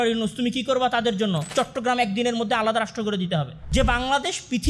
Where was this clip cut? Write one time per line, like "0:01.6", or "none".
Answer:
0:03.6